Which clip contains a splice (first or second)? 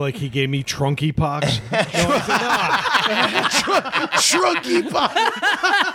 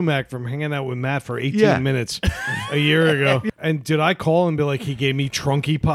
second